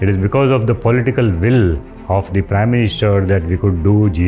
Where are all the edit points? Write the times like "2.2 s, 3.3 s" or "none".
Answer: 1.9 s

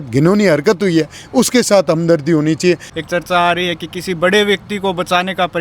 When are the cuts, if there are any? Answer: 2.9 s

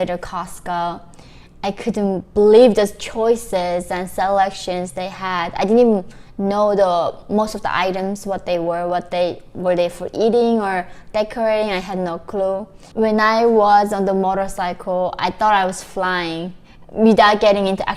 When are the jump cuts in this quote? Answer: 12.8 s

